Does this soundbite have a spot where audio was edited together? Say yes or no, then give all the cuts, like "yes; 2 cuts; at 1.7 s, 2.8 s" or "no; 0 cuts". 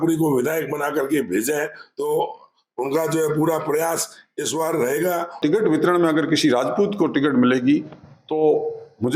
yes; 1 cut; at 5.4 s